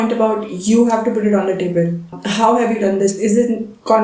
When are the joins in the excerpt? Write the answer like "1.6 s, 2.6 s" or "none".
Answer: none